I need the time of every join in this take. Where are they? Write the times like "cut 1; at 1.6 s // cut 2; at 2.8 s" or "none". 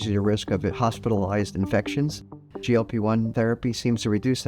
cut 1; at 2.1 s // cut 2; at 3.3 s

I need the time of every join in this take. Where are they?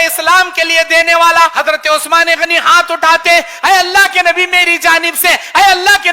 cut 1; at 1.5 s

